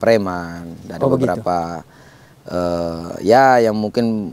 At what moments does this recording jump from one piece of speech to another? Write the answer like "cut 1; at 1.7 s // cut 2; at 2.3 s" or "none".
none